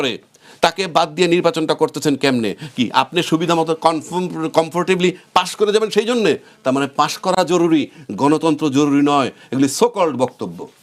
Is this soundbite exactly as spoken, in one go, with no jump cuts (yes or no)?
yes